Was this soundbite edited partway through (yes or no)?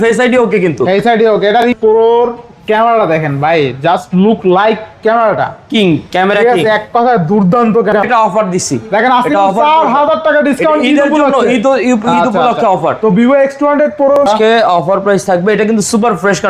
yes